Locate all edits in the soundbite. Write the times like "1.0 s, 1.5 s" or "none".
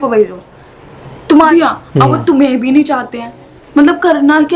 1.5 s